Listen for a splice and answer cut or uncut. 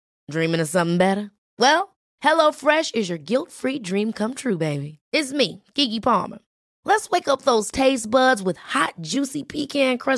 uncut